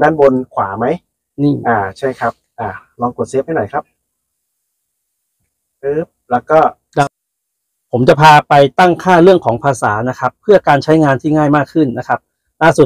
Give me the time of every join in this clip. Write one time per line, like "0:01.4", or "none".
0:07.0